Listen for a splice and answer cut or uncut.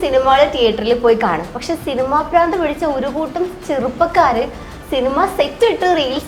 uncut